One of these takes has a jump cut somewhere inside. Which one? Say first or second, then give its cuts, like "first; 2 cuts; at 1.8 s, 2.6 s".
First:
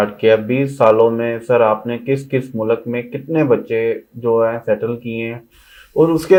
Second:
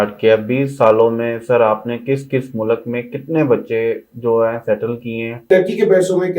second; 1 cut; at 5.5 s